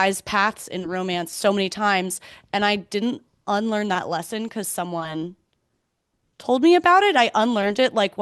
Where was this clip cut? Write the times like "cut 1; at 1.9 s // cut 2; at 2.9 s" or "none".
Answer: none